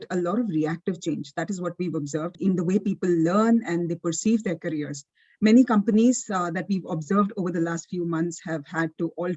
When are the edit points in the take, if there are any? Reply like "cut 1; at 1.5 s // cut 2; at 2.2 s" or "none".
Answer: cut 1; at 2.4 s